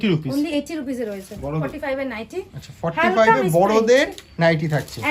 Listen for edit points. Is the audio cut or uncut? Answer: cut